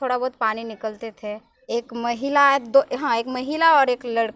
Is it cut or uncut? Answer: cut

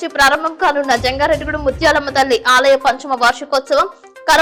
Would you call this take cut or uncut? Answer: uncut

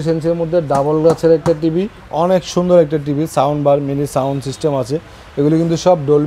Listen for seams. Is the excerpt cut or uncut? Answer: cut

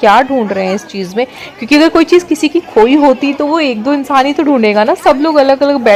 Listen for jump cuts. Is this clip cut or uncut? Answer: uncut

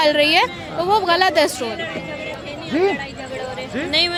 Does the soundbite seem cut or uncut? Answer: uncut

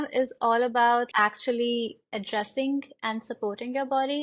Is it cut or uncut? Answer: cut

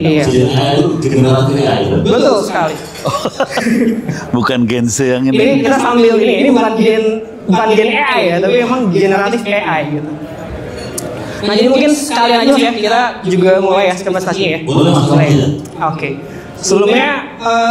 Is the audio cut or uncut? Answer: uncut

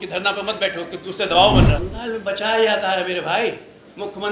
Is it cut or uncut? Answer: cut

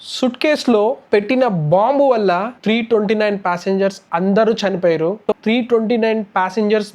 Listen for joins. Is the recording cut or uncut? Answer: cut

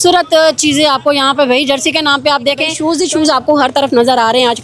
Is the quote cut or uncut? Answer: cut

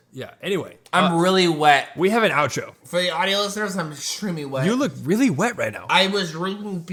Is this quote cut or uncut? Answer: uncut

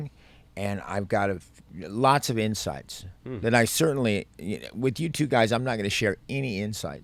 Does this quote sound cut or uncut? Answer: uncut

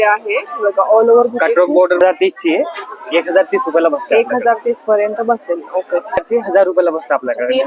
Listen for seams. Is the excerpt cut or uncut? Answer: cut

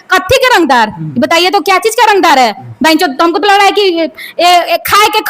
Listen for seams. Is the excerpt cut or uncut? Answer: uncut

